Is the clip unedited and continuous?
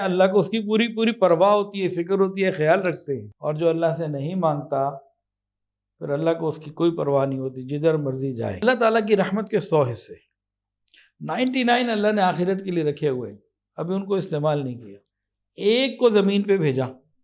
no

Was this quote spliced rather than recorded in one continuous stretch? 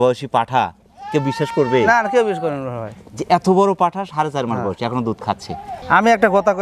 yes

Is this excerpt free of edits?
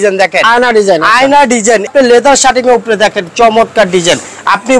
no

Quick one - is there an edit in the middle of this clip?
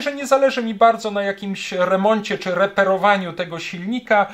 no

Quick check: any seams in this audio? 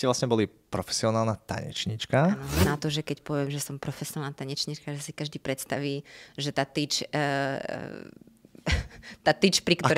yes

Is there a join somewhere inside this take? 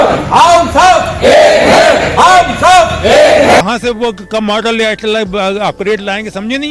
yes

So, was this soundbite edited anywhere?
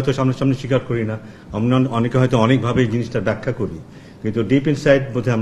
no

